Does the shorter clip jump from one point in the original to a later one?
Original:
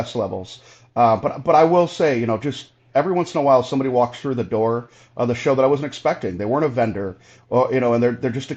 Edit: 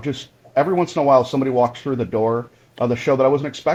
no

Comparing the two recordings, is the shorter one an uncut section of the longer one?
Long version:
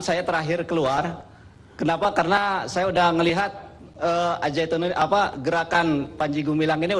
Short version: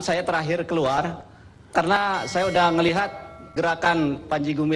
no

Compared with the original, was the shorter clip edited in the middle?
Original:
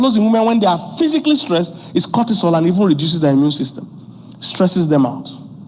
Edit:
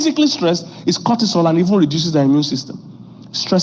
no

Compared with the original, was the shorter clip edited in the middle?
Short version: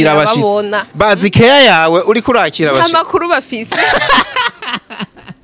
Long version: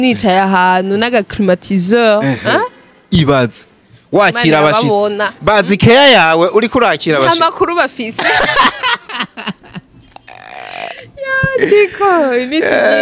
no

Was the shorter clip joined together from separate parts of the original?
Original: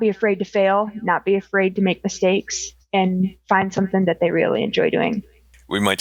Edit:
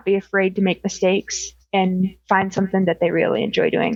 no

